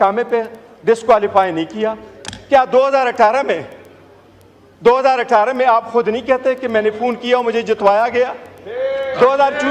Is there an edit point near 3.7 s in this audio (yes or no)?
no